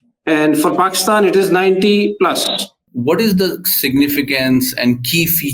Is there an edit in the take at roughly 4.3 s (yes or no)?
no